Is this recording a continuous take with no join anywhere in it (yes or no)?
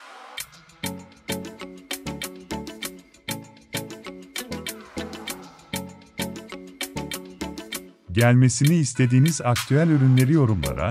no